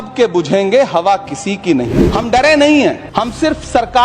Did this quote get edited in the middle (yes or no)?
yes